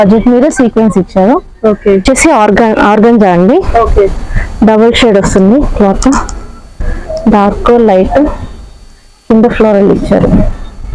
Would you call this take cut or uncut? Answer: cut